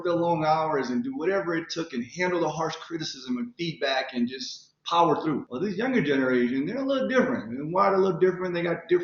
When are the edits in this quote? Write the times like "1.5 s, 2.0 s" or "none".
5.5 s